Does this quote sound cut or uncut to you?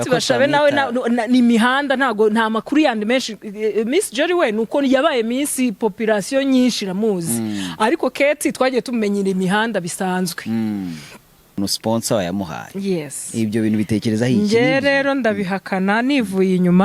cut